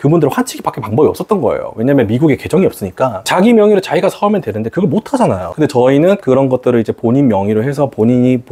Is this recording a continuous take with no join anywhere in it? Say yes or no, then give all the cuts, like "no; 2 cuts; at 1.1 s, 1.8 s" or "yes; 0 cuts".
no; 2 cuts; at 3.2 s, 5.4 s